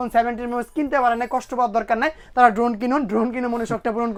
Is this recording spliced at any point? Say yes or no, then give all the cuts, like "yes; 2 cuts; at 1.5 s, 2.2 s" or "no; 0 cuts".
no; 0 cuts